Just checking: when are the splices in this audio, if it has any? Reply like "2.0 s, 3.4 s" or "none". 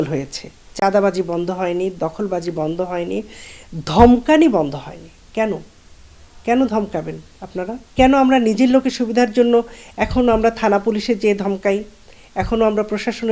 7.8 s